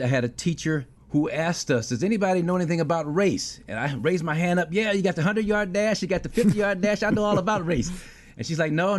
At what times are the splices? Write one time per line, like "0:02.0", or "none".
0:00.9